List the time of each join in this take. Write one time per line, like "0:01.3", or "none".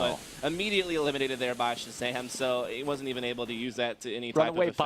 none